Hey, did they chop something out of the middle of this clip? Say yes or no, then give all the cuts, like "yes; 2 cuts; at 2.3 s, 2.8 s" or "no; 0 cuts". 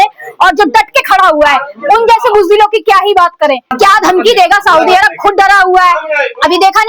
yes; 1 cut; at 3.7 s